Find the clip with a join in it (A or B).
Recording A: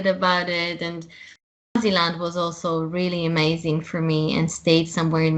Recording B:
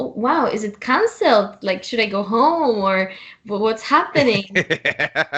A